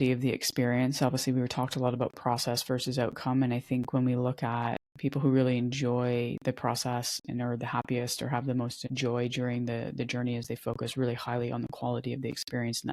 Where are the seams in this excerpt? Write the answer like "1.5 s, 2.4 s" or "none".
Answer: 4.9 s, 8.8 s